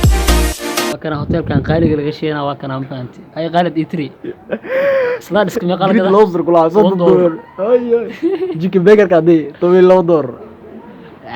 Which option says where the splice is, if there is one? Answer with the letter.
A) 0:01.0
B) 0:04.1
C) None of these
A